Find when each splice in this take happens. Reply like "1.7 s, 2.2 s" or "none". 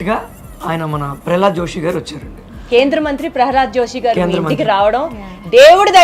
none